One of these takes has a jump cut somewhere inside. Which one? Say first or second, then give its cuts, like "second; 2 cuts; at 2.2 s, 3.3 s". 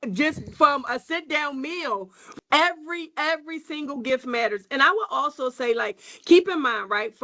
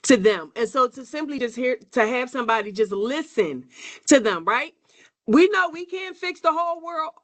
first; 1 cut; at 2.2 s